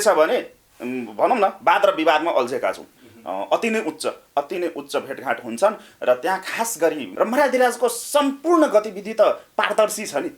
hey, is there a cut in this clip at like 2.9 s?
yes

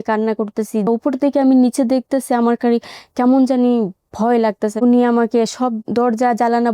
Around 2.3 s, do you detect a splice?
no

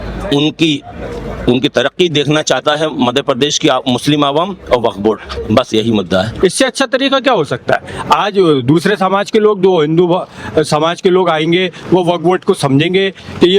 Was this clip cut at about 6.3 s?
yes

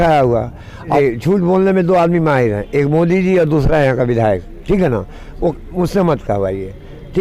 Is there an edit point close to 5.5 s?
yes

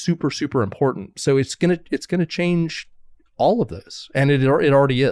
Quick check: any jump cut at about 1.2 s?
no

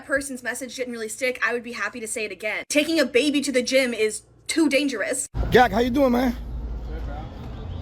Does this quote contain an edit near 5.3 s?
yes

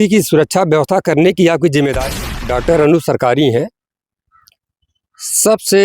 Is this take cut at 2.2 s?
yes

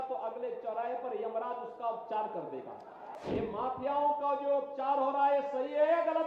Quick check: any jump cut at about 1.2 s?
no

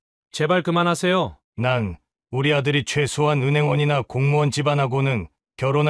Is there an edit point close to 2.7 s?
no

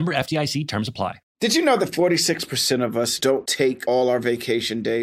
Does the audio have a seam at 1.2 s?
yes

